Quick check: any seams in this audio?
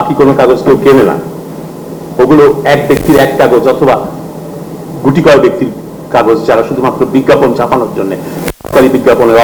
no; 0 cuts

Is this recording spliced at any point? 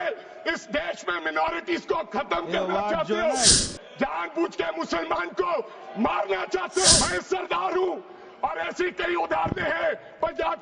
yes; 2 cuts; at 3.6 s, 7.0 s

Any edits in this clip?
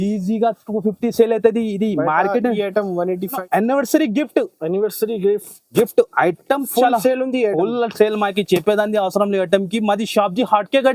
yes; 1 cut; at 3.3 s

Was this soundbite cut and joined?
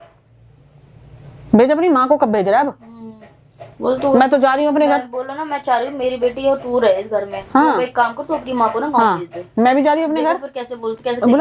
no; 0 cuts

